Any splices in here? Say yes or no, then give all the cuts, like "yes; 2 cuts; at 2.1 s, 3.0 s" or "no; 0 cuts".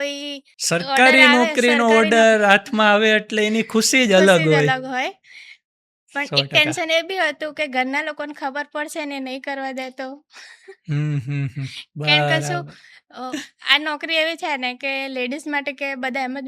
no; 0 cuts